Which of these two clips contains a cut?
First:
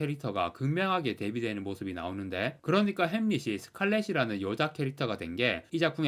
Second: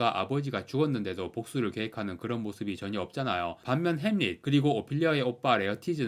second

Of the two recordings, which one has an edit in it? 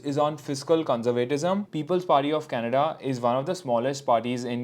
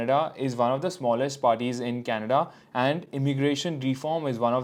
first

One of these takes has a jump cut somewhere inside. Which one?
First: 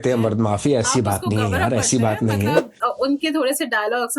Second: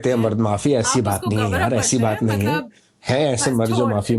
first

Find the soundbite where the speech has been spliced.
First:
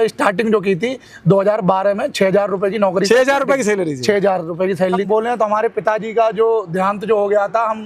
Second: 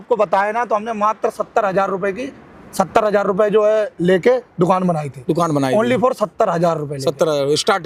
first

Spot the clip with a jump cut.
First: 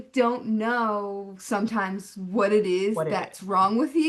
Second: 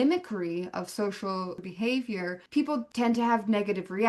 second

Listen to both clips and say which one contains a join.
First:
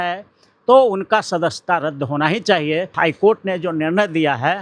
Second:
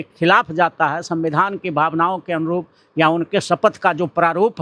first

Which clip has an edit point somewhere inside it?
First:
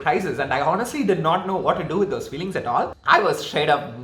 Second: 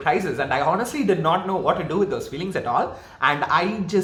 first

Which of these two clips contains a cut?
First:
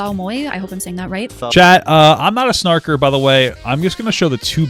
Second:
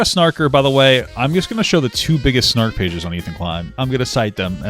second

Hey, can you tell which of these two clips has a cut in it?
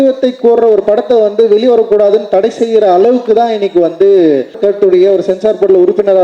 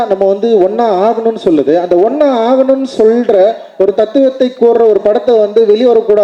first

